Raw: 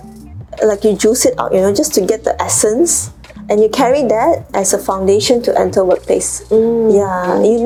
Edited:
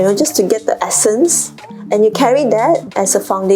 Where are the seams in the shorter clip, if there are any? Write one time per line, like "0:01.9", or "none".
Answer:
none